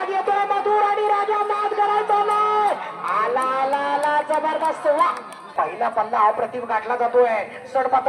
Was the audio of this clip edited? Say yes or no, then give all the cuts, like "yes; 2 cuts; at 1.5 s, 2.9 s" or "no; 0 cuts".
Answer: yes; 1 cut; at 5.4 s